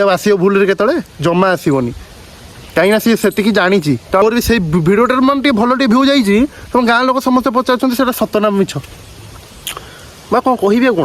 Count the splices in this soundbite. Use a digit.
1